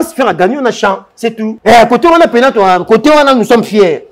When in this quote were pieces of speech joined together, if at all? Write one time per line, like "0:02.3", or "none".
0:01.5

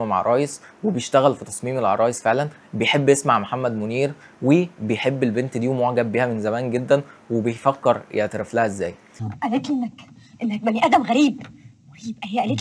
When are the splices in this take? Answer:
0:09.0

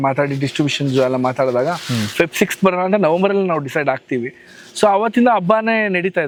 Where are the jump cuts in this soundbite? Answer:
none

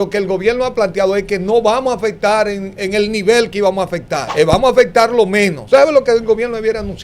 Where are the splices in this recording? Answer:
0:04.2
0:05.6

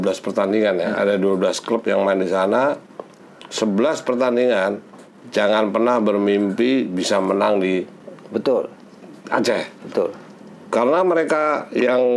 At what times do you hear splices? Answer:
none

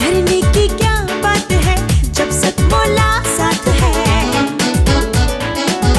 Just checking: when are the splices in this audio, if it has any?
none

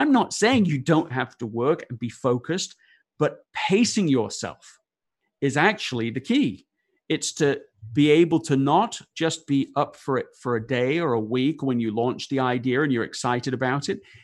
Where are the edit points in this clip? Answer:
none

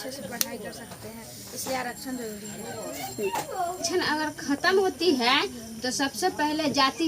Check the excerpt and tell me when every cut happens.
0:03.8

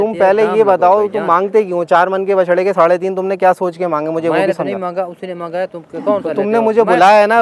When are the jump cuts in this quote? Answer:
none

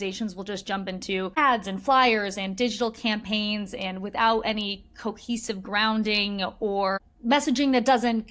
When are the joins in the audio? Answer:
0:01.4
0:07.0

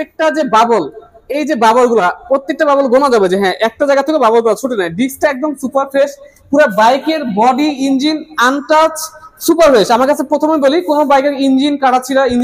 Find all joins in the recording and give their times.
none

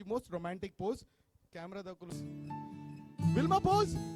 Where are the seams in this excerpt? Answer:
0:02.2

